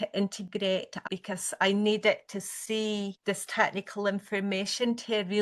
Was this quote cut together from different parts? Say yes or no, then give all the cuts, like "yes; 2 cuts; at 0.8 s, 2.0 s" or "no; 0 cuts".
yes; 2 cuts; at 1.1 s, 3.1 s